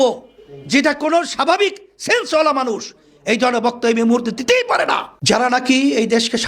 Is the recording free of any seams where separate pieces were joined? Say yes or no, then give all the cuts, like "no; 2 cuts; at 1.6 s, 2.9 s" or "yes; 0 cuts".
no; 1 cut; at 5.1 s